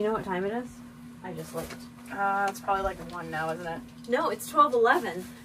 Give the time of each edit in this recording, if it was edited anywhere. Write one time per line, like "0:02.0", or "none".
none